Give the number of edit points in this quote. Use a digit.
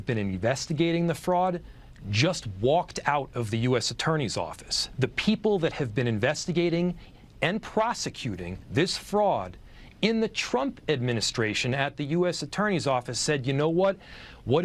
0